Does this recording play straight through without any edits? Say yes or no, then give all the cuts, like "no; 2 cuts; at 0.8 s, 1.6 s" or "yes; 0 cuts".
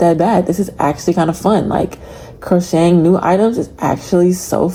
yes; 0 cuts